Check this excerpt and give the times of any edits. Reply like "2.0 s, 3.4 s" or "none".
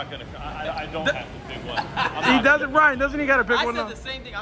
none